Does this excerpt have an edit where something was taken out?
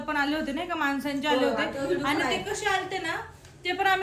no; 0 cuts

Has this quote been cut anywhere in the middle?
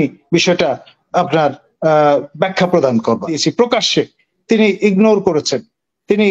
yes; 1 cut; at 3.4 s

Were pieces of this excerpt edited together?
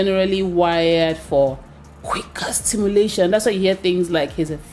no; 0 cuts

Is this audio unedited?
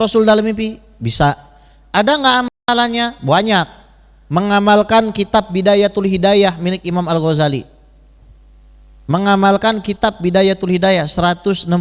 yes; 0 cuts

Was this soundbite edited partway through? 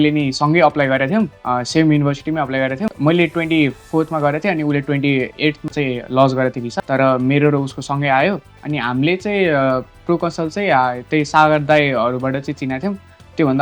yes; 1 cut; at 5.7 s

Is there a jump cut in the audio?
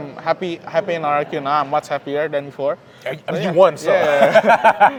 no; 0 cuts

